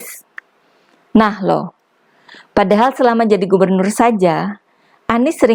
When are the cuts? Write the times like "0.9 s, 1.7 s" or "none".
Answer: none